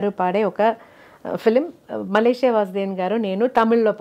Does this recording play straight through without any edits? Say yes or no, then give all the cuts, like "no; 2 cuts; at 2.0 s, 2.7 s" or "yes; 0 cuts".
yes; 0 cuts